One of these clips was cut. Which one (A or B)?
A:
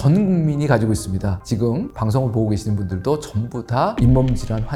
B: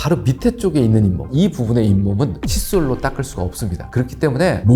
B